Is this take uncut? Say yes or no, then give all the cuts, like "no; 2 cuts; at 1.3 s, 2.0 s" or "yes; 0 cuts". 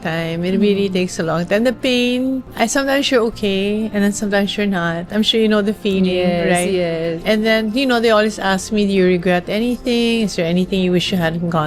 yes; 0 cuts